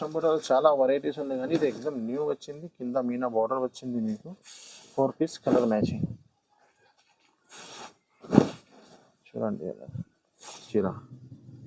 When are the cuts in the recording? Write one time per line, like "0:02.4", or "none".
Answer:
0:10.7